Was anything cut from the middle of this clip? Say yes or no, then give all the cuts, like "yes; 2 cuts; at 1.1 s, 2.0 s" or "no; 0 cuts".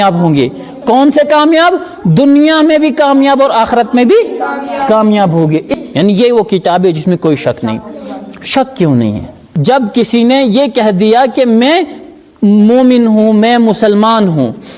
yes; 2 cuts; at 5.7 s, 9.5 s